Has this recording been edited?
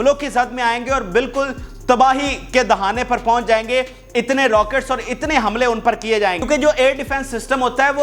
no; 0 cuts

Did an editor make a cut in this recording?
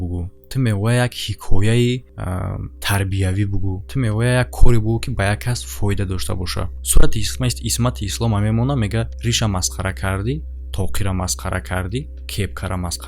no; 0 cuts

